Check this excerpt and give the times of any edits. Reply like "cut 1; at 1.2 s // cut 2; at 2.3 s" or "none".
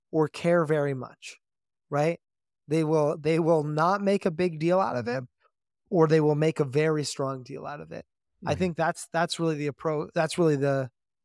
none